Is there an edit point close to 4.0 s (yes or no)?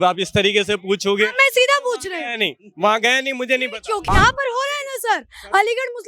yes